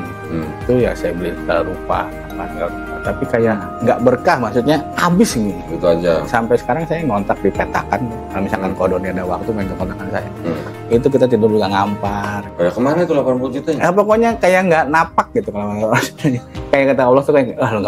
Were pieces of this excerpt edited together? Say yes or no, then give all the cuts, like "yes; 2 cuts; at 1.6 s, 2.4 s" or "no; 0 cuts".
no; 0 cuts